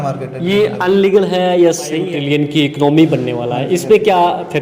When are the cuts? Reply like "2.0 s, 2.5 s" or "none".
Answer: 2.0 s